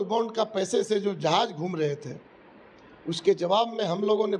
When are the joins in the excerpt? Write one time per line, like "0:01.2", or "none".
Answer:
none